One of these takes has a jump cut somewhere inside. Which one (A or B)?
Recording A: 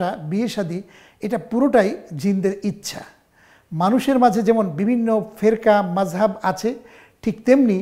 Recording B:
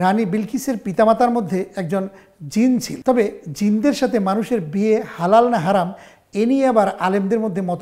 B